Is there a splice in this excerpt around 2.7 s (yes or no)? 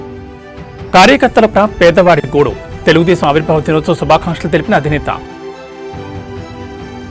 no